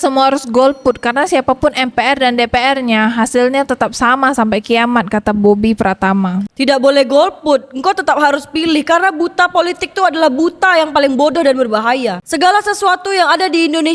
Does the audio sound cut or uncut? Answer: uncut